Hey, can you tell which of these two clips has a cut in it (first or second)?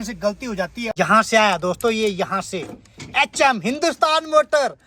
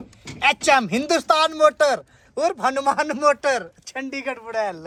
first